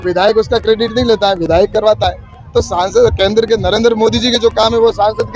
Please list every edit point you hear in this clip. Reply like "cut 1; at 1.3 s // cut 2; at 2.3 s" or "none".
none